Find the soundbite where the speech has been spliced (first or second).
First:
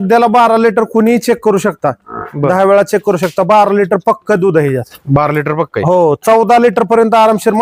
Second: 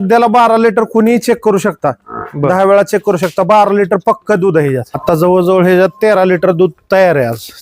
second